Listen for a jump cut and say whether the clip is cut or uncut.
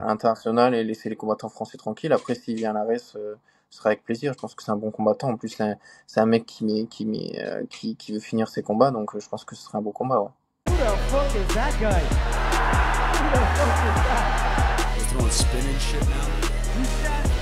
cut